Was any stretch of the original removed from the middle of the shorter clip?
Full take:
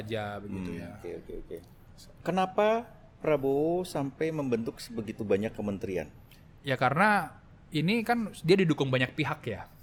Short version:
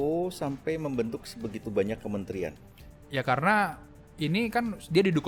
no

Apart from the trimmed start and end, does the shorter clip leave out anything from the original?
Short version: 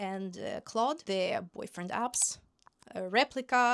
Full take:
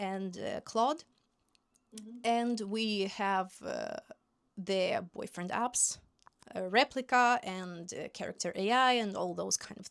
yes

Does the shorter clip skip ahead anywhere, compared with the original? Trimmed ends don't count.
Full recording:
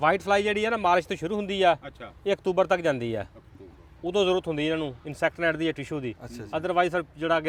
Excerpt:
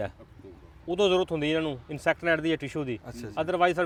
no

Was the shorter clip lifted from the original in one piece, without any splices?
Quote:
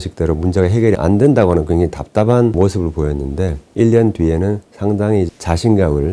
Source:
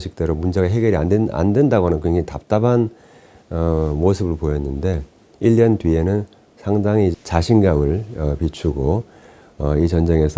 no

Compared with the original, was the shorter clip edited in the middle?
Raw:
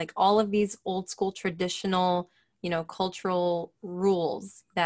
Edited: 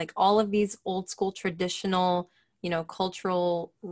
no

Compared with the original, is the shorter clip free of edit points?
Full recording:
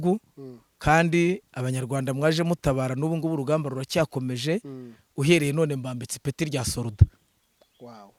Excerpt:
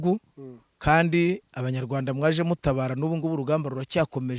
yes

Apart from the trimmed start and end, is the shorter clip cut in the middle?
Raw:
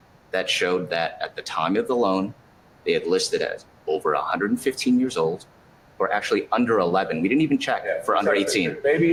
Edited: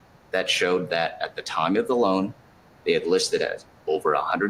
no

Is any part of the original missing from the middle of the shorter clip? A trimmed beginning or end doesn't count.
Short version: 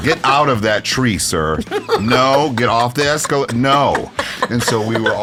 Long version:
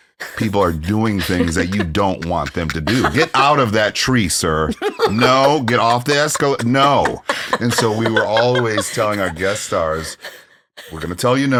no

